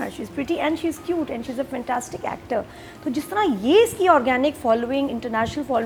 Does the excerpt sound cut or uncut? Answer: uncut